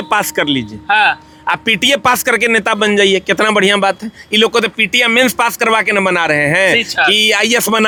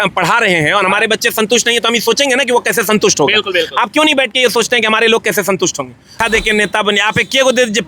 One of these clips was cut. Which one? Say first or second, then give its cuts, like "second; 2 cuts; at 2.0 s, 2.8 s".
second; 1 cut; at 6.1 s